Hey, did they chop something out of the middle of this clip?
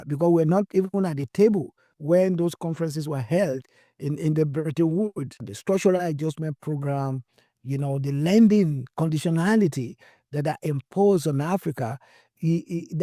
yes; 1 cut; at 5.5 s

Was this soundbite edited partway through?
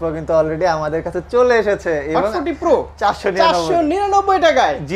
yes; 1 cut; at 2.9 s

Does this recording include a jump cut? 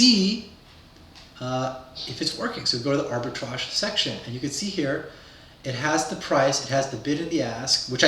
no; 0 cuts

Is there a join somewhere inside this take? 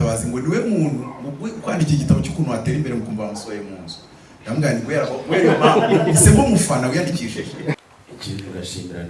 yes; 1 cut; at 7.8 s

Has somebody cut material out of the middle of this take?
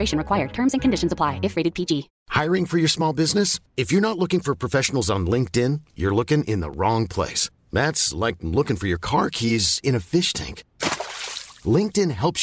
no; 0 cuts

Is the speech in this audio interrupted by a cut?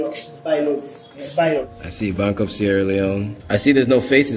yes; 2 cuts; at 1.7 s, 3.3 s

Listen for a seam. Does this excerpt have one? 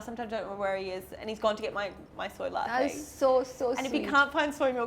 no; 0 cuts

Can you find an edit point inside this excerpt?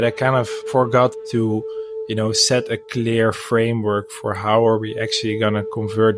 yes; 1 cut; at 1.2 s

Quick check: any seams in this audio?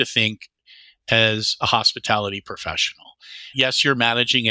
yes; 1 cut; at 3.5 s

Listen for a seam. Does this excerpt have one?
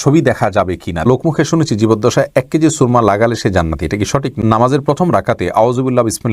yes; 2 cuts; at 1.1 s, 4.3 s

